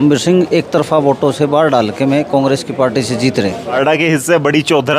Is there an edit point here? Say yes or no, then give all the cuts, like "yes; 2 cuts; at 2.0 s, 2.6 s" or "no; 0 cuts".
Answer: yes; 1 cut; at 3.7 s